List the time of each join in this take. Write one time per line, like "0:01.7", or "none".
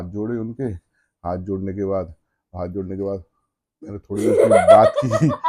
none